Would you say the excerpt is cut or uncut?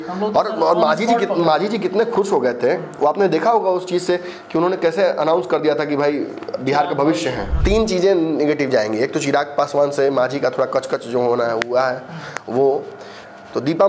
cut